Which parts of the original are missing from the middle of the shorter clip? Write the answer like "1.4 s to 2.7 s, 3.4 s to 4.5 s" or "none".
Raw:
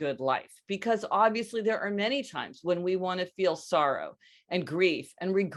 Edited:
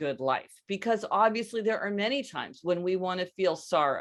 none